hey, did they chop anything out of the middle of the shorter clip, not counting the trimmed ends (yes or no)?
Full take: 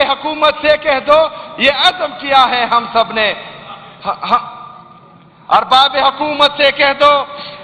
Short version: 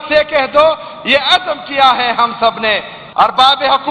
yes